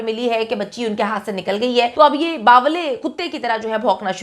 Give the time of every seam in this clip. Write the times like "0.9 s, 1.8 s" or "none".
1.9 s